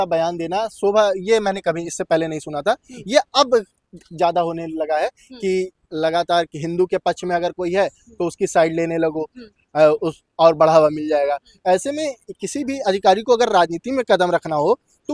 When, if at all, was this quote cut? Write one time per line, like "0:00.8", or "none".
none

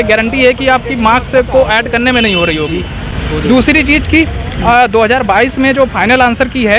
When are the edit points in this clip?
none

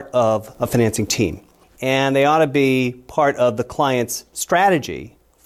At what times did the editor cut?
none

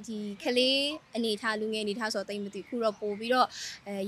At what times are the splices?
none

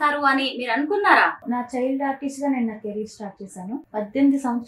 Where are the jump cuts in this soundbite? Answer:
0:01.4
0:03.8

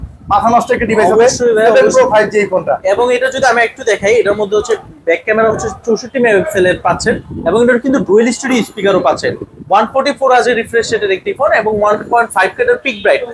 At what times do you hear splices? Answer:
none

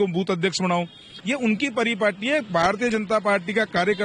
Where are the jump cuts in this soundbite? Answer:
0:01.1

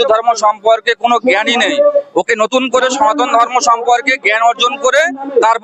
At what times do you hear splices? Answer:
none

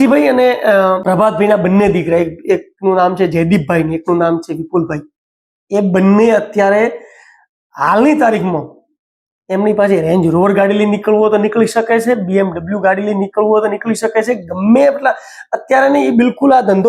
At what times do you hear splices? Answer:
0:01.0

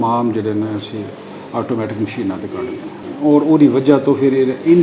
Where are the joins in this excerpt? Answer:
0:03.1

